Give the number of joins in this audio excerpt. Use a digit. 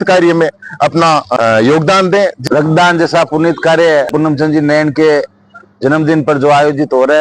3